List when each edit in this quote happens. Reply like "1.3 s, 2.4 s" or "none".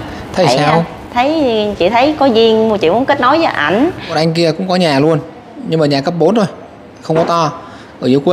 4.1 s

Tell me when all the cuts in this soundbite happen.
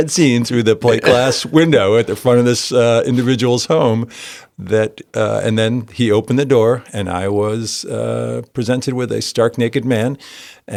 none

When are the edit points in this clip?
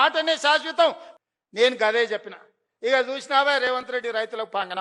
1.1 s

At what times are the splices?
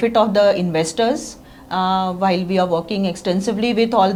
none

